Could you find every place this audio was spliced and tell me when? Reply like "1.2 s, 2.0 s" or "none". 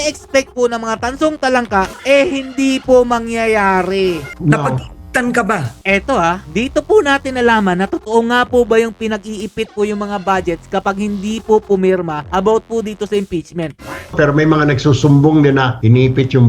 1.9 s, 4.3 s, 14.1 s

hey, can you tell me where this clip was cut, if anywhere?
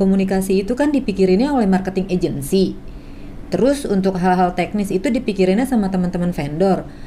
none

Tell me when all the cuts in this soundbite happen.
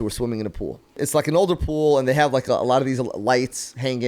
1.0 s

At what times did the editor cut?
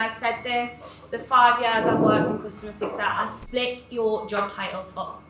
3.4 s

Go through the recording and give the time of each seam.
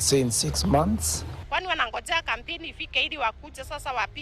1.4 s

